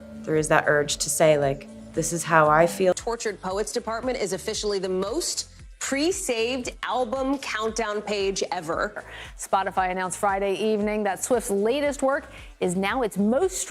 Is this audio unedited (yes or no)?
no